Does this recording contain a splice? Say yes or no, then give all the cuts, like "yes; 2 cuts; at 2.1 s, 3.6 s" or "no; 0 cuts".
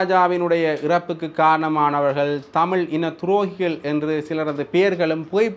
no; 0 cuts